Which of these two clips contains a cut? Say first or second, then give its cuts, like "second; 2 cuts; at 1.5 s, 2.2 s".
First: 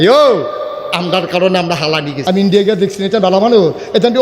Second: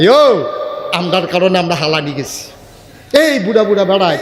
first; 1 cut; at 2.1 s